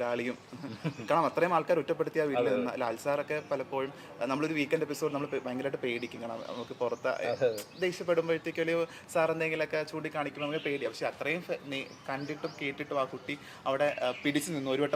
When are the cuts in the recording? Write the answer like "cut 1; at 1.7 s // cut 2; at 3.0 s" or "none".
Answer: none